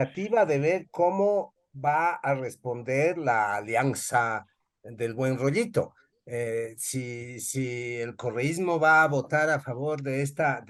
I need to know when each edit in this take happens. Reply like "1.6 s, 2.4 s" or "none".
none